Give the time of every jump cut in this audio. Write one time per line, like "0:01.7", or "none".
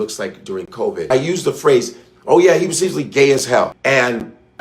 0:01.1
0:03.8